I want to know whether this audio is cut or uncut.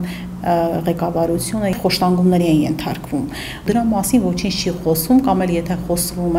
cut